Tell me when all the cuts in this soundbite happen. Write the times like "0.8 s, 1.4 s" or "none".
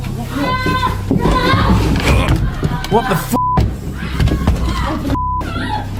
none